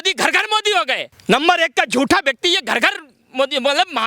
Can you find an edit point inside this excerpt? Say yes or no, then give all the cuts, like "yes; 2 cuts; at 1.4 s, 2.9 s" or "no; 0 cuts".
yes; 1 cut; at 1.1 s